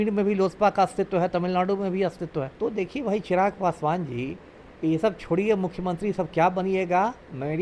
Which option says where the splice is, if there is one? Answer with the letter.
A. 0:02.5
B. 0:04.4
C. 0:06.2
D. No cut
A